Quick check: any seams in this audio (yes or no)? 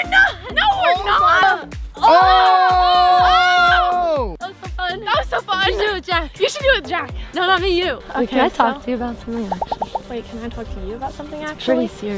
yes